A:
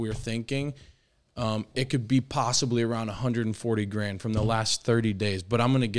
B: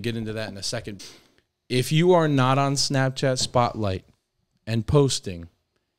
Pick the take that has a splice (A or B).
B